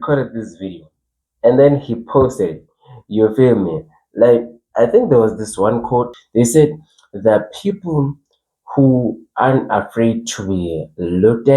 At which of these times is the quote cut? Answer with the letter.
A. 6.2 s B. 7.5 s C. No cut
A